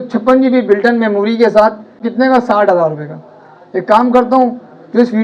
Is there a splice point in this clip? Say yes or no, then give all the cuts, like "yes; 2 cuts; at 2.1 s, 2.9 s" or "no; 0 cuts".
yes; 1 cut; at 2.0 s